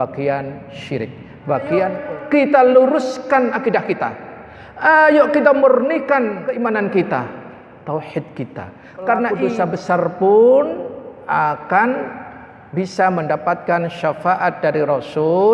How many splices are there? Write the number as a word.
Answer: three